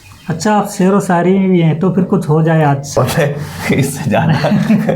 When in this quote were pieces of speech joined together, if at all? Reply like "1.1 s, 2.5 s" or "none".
3.0 s